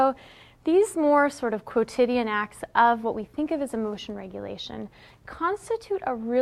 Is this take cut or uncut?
uncut